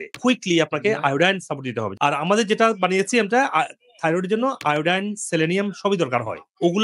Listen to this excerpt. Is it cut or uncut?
cut